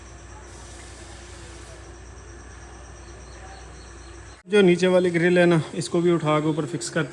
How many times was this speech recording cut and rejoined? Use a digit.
1